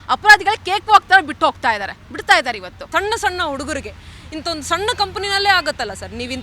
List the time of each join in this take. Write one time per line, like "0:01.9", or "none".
0:02.7